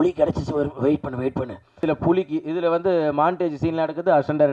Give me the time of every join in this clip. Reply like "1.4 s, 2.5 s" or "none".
1.8 s